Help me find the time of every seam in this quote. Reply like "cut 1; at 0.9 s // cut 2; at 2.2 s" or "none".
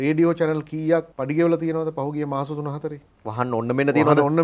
cut 1; at 1.1 s